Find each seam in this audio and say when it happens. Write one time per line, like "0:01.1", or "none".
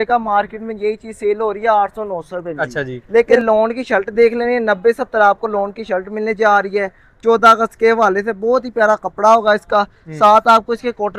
0:03.3